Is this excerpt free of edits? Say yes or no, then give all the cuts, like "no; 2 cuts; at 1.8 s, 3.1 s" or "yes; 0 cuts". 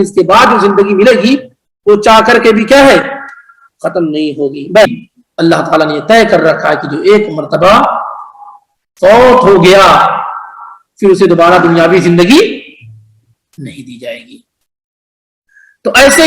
no; 1 cut; at 4.9 s